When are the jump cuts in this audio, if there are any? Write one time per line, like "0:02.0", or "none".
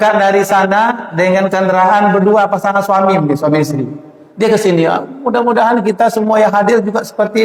none